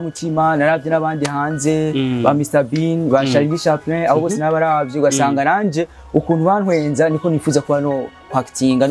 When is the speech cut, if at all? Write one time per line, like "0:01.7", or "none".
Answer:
none

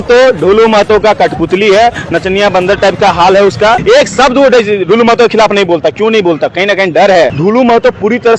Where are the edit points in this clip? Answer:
0:03.8
0:07.3

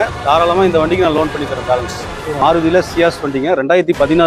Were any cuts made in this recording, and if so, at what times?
0:02.4

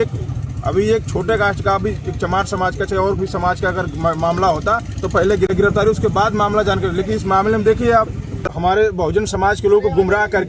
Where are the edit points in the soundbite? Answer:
0:05.5
0:08.5

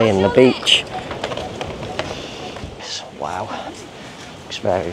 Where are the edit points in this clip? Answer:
0:02.8

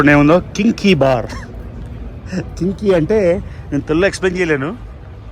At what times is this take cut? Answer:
none

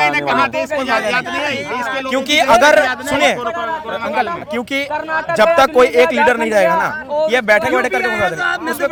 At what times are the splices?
none

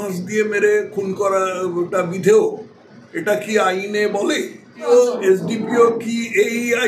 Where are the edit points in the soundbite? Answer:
0:04.8

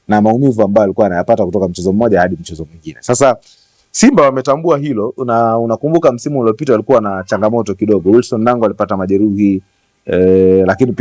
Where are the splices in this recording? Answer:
none

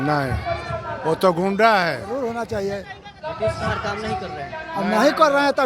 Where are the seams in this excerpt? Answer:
0:02.1

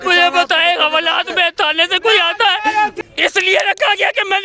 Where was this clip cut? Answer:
0:03.0

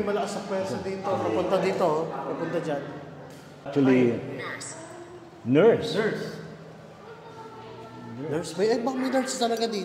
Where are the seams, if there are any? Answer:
0:03.7

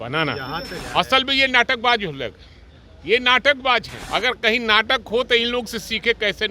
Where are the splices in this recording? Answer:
0:00.8
0:04.0

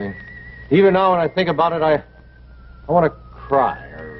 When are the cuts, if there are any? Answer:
0:02.7

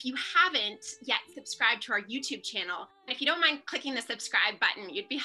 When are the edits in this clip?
0:03.0

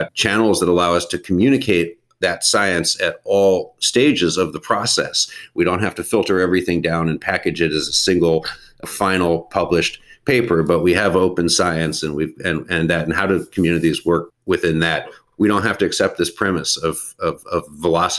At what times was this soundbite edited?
0:14.3
0:15.2

